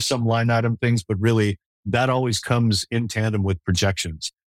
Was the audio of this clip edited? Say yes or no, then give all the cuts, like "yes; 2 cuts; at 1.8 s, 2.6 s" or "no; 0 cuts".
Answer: yes; 1 cut; at 1.7 s